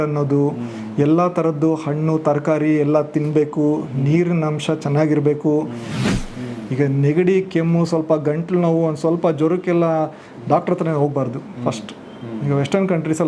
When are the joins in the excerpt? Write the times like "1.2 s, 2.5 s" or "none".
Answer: 6.1 s